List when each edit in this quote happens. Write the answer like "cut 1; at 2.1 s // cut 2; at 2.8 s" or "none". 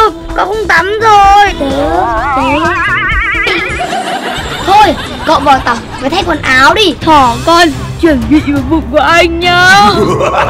cut 1; at 1.5 s // cut 2; at 7.0 s